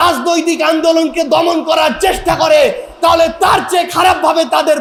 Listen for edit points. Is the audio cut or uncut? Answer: uncut